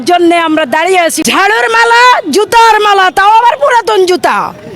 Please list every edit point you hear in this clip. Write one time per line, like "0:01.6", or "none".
0:01.2